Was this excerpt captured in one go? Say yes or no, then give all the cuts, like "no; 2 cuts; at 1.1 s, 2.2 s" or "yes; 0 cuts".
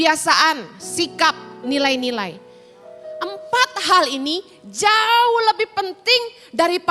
yes; 0 cuts